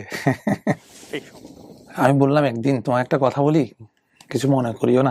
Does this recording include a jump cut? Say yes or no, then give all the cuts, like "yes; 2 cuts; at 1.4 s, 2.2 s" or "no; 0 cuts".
yes; 1 cut; at 0.9 s